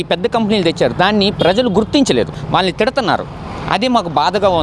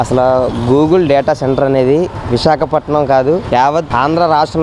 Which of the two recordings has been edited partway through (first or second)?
first